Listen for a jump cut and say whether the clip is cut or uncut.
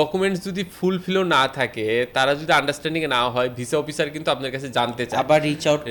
uncut